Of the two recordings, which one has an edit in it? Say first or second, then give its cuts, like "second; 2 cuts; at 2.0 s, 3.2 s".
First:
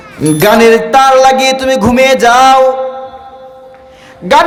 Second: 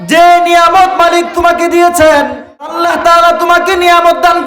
second; 1 cut; at 2.8 s